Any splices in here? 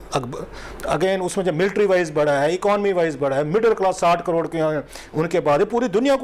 no; 0 cuts

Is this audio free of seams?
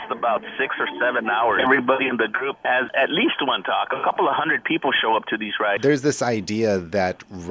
no; 4 cuts; at 1.6 s, 2.9 s, 4.0 s, 5.8 s

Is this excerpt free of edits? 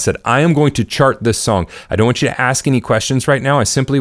yes; 0 cuts

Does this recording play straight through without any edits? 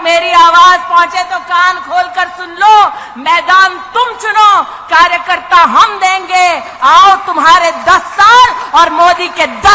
yes; 0 cuts

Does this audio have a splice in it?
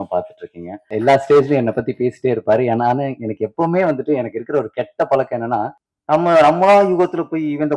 yes; 2 cuts; at 0.9 s, 5.8 s

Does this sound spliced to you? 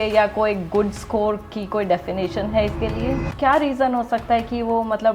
yes; 1 cut; at 3.3 s

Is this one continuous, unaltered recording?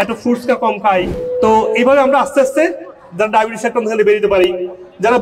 no; 1 cut; at 1.2 s

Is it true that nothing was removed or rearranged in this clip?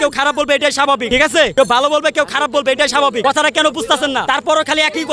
no; 3 cuts; at 1.4 s, 3.2 s, 4.2 s

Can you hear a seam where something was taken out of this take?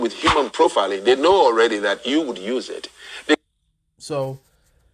no; 0 cuts

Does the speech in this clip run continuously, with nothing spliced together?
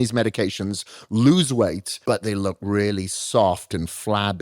no; 1 cut; at 1.9 s

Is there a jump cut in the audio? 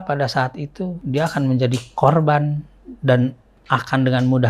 yes; 1 cut; at 1.0 s

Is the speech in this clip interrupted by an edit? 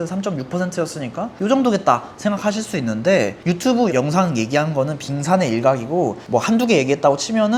no; 0 cuts

